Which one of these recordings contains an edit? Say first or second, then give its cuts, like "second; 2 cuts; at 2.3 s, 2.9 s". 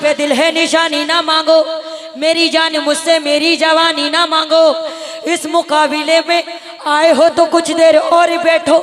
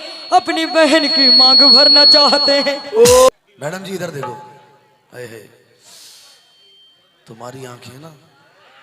second; 1 cut; at 3.3 s